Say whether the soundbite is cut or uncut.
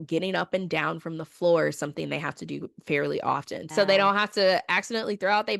cut